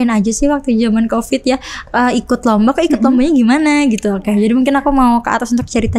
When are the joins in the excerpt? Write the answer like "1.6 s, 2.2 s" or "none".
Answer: none

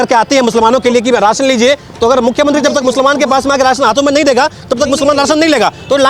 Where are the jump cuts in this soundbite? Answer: none

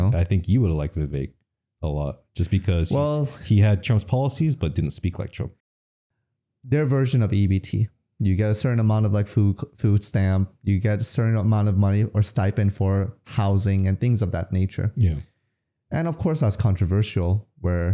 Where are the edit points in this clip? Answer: 5.6 s

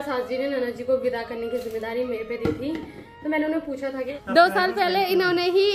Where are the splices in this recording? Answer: 4.1 s

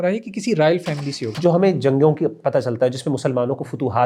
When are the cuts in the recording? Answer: 1.2 s

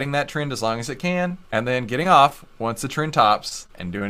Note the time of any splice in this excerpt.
1.4 s

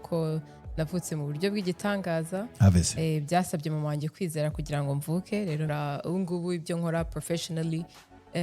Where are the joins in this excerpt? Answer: 5.7 s

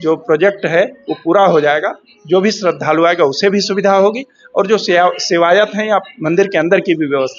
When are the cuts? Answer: none

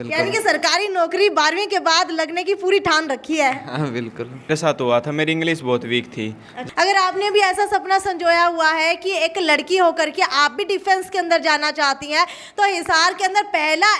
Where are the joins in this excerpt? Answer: 4.5 s, 6.6 s

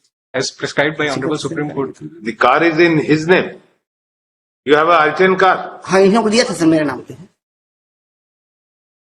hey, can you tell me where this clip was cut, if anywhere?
none

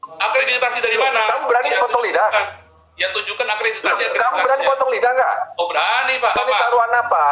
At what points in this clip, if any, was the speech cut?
6.4 s

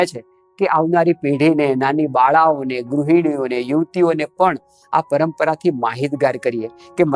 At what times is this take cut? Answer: none

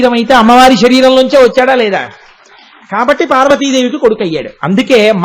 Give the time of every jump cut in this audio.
none

